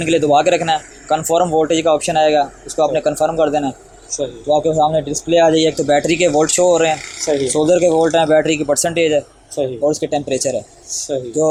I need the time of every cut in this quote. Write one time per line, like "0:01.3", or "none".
none